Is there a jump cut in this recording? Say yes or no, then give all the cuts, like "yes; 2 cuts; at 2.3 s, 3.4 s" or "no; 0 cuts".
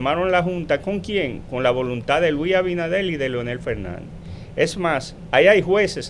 no; 0 cuts